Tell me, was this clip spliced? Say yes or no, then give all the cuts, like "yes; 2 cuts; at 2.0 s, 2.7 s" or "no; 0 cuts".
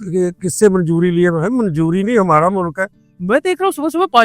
yes; 1 cut; at 3.0 s